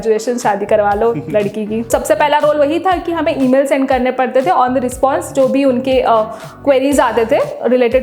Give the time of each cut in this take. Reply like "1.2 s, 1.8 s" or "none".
1.9 s